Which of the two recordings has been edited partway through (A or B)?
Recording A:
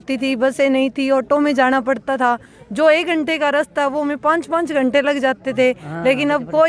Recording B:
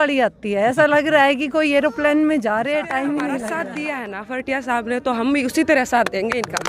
B